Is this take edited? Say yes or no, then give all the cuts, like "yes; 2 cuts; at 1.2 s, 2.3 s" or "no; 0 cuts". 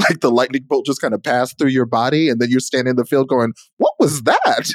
no; 0 cuts